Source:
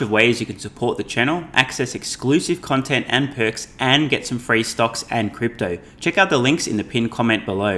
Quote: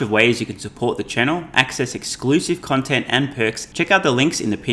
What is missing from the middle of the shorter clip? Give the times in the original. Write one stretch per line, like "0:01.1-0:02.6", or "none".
0:03.6-0:05.9